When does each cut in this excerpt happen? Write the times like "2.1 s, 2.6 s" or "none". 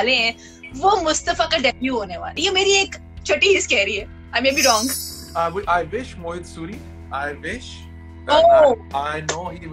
5.2 s